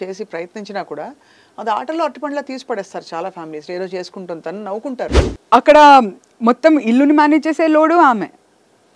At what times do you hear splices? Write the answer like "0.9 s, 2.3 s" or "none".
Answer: 5.2 s